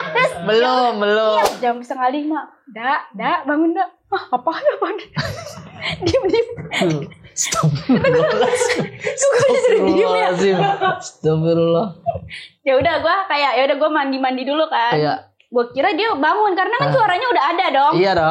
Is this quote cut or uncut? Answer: cut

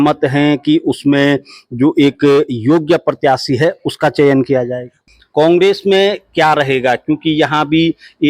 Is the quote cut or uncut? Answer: cut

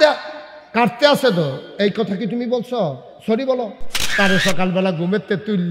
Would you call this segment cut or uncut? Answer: cut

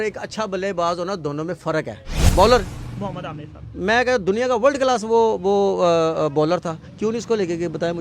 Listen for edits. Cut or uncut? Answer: cut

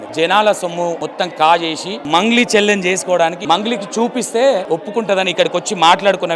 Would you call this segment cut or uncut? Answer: cut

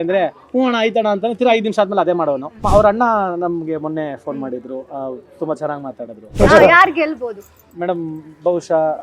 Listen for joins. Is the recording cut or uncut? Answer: cut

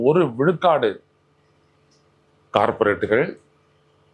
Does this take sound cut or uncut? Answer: uncut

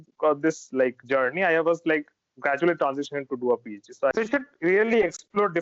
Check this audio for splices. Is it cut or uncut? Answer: cut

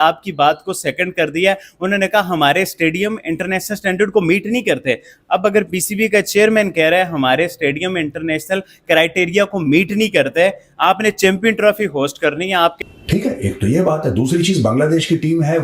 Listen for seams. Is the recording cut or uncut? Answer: cut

